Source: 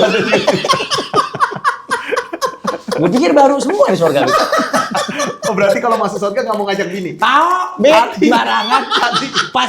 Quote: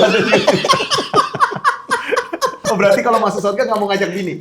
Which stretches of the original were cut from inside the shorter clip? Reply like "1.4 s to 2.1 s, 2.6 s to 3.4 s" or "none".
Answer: 2.6 s to 5.4 s